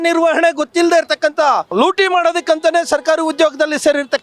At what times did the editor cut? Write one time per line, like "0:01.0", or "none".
0:01.7